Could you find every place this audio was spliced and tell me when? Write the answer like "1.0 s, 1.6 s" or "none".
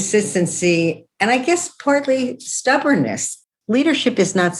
3.4 s